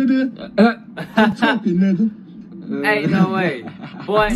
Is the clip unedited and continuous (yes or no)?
yes